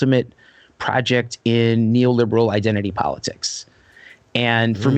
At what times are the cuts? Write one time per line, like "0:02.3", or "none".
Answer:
none